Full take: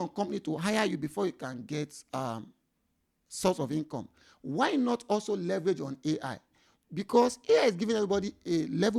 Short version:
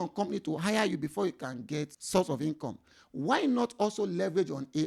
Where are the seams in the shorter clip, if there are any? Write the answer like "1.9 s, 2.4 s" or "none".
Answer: 2.0 s